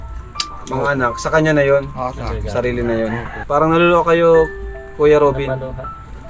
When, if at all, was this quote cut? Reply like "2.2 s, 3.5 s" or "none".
3.4 s